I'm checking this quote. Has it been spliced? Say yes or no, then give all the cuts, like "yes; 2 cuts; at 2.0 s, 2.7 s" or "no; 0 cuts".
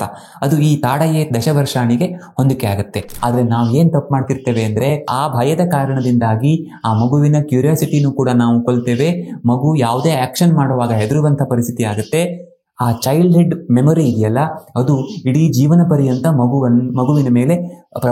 yes; 2 cuts; at 3.1 s, 5.0 s